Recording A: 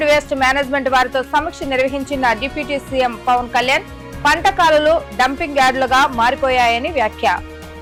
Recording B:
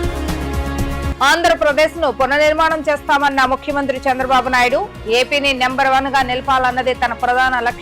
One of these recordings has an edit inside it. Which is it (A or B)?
B